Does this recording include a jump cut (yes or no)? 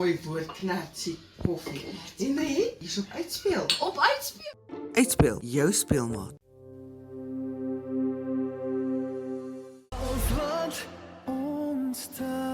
yes